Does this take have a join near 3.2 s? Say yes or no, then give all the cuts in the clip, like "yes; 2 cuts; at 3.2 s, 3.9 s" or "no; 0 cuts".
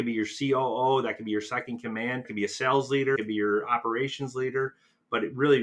yes; 2 cuts; at 2.3 s, 3.2 s